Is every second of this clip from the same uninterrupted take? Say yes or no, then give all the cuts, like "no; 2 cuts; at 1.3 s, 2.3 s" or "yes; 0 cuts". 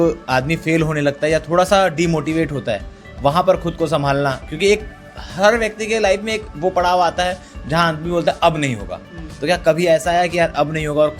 yes; 0 cuts